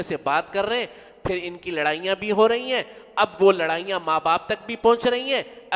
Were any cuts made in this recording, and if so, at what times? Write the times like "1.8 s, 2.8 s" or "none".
none